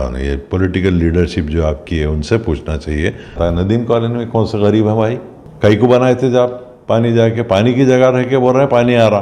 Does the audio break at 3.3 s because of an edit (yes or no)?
yes